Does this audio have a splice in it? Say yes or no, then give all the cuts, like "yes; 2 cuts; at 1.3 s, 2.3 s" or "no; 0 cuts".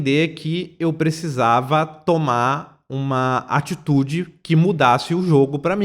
no; 0 cuts